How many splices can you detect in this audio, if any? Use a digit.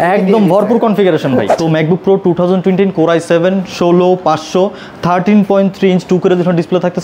1